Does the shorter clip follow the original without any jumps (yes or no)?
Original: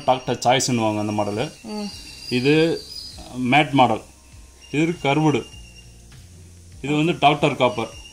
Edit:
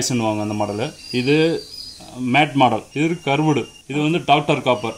no